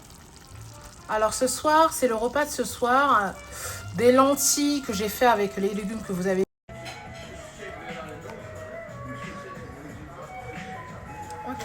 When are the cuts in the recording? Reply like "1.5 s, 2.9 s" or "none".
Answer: 6.4 s